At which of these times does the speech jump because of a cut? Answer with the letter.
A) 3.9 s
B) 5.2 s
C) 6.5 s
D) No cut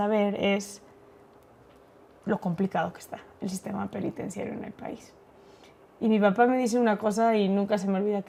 D